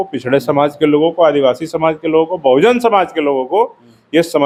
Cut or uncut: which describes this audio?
uncut